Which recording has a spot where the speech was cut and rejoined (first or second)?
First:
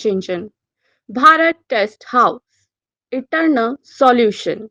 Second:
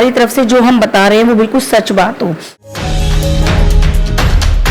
second